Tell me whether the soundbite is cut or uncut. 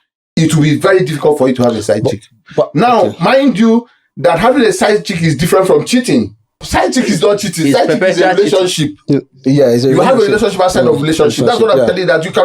cut